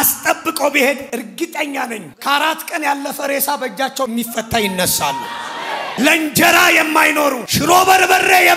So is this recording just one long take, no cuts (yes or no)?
no